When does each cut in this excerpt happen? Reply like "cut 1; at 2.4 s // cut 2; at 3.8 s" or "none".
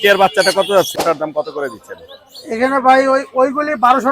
cut 1; at 1.0 s